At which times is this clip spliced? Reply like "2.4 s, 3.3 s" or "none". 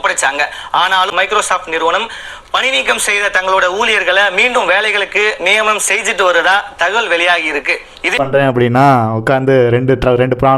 1.1 s, 8.1 s